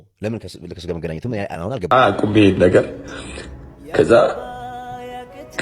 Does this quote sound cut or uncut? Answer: cut